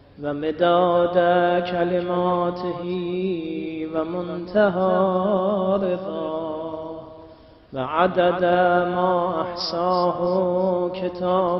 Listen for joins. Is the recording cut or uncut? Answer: uncut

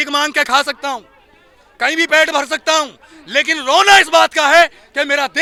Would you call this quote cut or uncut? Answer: uncut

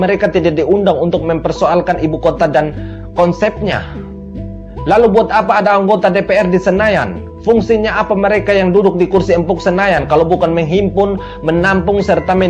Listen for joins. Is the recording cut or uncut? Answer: uncut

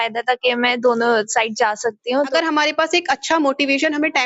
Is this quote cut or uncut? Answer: cut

